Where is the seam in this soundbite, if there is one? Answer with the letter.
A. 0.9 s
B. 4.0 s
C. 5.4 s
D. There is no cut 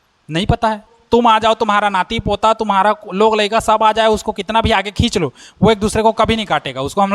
A